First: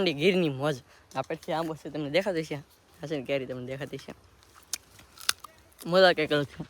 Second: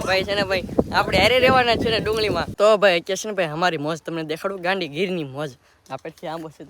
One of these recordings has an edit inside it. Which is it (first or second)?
second